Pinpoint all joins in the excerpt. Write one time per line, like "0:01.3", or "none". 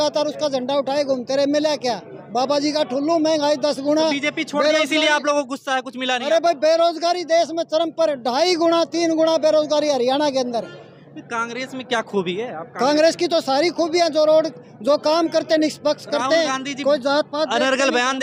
none